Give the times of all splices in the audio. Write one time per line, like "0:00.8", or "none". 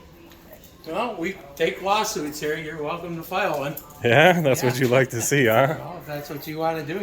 none